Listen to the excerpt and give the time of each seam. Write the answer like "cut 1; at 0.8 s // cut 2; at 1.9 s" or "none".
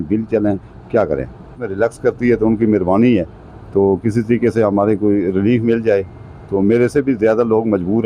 cut 1; at 1.6 s